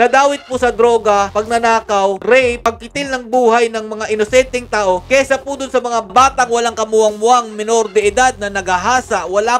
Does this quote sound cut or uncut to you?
uncut